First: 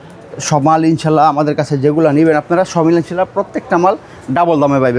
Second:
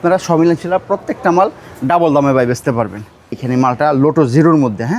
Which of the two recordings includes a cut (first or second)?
second